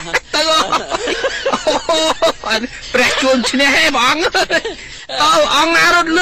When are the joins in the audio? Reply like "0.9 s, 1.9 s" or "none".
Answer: none